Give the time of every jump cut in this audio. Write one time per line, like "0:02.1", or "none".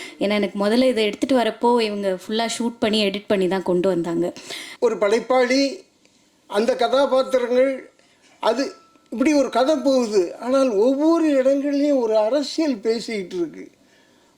0:04.6